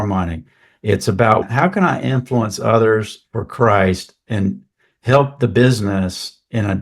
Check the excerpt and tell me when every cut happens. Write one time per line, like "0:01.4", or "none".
0:01.4